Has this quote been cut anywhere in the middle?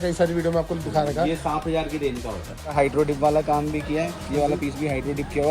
yes; 1 cut; at 2.7 s

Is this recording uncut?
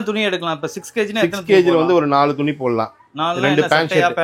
yes; 0 cuts

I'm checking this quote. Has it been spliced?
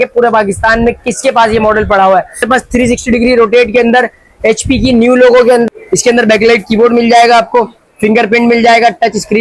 yes; 2 cuts; at 2.4 s, 5.7 s

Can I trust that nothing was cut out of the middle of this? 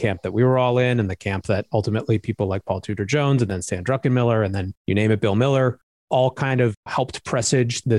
no; 1 cut; at 6.8 s

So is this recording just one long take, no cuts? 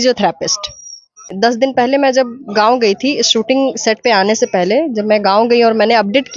no; 1 cut; at 1.3 s

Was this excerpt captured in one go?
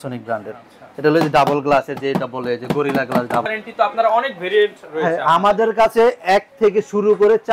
no; 1 cut; at 3.4 s

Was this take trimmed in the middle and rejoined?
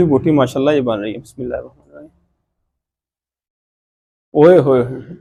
no; 0 cuts

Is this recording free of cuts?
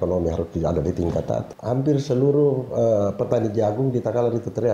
no; 1 cut; at 1.5 s

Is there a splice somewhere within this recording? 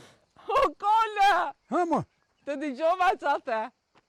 no; 0 cuts

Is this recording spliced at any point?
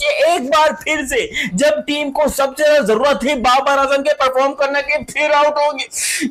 no; 0 cuts

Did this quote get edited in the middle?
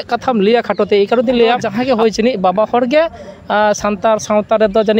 yes; 1 cut; at 1.7 s

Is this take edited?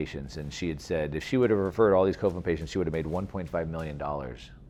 no; 0 cuts

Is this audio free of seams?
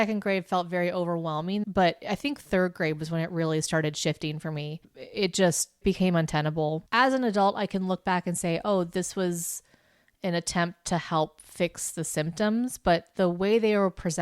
no; 2 cuts; at 1.6 s, 6.8 s

